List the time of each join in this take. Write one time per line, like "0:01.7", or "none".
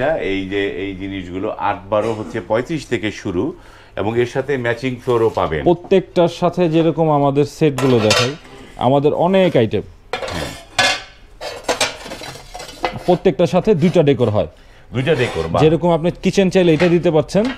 none